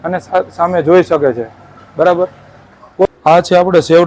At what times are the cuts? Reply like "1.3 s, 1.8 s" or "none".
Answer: 3.1 s